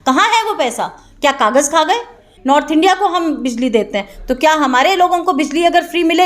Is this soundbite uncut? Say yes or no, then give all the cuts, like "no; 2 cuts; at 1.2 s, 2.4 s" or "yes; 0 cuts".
no; 1 cut; at 2.3 s